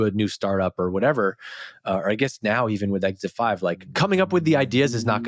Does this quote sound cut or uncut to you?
cut